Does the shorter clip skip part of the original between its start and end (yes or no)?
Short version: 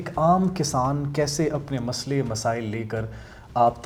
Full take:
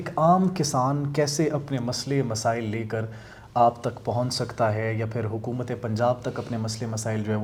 no